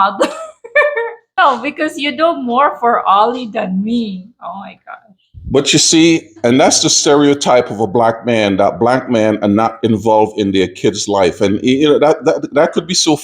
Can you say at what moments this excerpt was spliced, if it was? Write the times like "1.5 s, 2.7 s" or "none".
1.4 s